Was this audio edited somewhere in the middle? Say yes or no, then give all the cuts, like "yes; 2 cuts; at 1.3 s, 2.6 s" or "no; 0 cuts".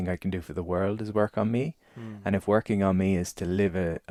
no; 0 cuts